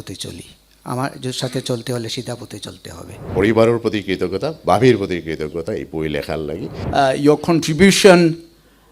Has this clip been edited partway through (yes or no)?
yes